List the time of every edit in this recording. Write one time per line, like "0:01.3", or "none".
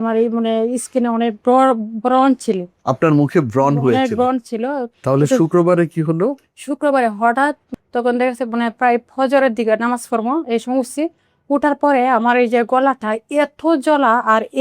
0:04.9
0:07.7